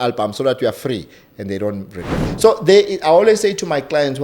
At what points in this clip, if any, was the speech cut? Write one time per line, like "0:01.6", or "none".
0:02.3